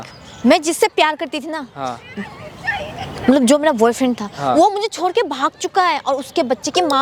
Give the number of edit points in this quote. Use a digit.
0